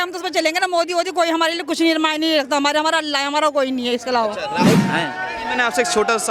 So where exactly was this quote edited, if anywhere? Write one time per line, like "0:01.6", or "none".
0:04.8